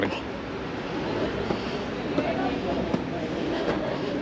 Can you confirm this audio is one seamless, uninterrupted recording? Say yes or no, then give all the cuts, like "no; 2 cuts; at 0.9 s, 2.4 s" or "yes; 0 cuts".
yes; 0 cuts